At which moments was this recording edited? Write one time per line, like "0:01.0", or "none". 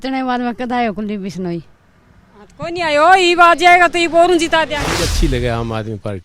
0:05.1